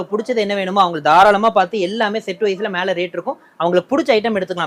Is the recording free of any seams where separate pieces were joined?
yes; 0 cuts

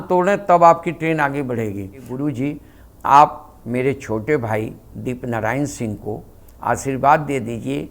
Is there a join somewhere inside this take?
yes; 1 cut; at 2.0 s

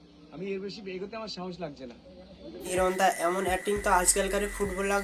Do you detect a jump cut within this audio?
no; 0 cuts

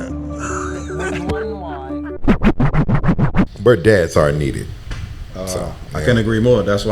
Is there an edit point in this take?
yes; 2 cuts; at 2.1 s, 2.9 s

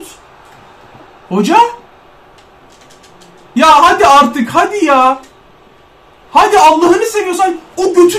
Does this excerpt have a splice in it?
no; 0 cuts

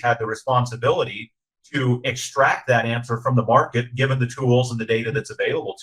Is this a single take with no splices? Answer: yes; 0 cuts

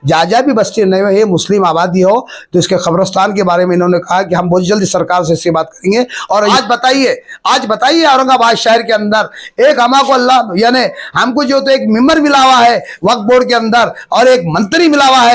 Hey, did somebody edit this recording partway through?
yes; 1 cut; at 6.5 s

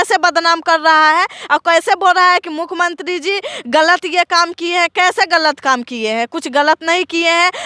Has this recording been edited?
no; 0 cuts

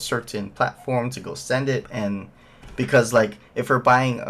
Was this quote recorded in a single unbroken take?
no; 1 cut; at 1.9 s

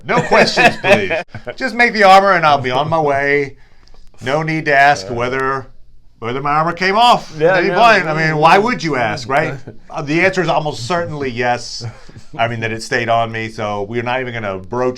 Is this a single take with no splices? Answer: no; 1 cut; at 1.2 s

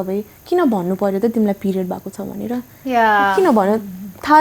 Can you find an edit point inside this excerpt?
no; 0 cuts

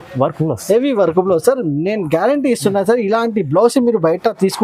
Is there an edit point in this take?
no; 0 cuts

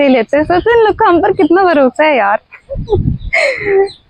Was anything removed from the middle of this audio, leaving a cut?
no; 0 cuts

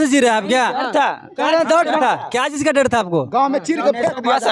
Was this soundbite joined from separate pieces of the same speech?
no; 0 cuts

